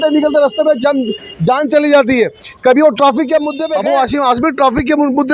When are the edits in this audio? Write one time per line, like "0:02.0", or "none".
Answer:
0:03.6

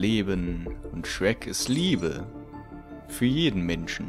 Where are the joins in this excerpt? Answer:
none

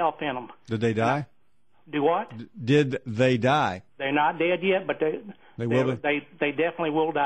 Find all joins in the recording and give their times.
none

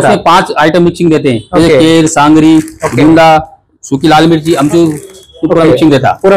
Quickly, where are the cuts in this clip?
none

